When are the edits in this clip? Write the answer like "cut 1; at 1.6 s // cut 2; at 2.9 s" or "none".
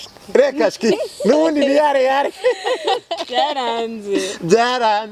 none